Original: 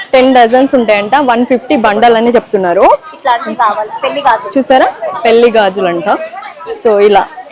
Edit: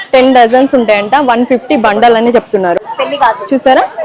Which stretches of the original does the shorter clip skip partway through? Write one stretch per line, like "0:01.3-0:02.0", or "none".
0:02.8-0:03.8